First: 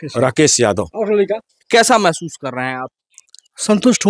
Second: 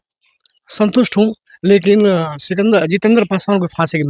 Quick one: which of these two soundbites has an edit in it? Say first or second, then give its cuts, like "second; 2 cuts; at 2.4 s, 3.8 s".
first; 1 cut; at 1.5 s